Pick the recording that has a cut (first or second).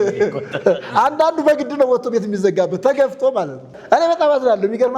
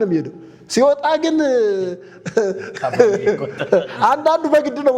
first